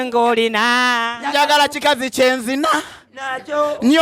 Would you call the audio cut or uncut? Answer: uncut